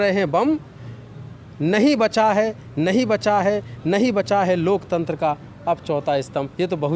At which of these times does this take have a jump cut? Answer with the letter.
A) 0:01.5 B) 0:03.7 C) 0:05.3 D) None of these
D